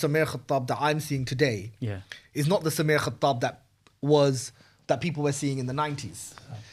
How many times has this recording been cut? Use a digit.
0